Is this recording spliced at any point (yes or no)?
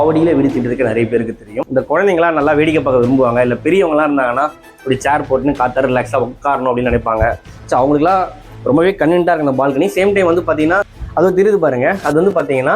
yes